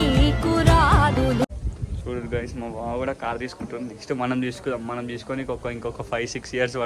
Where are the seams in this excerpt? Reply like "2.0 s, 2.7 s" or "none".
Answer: 1.4 s